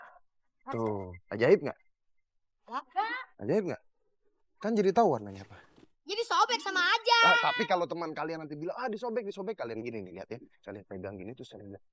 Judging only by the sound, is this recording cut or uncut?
uncut